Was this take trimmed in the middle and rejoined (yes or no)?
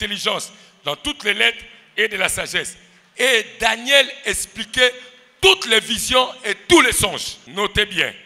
yes